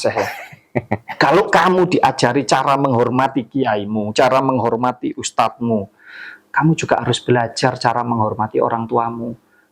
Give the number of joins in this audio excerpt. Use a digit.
1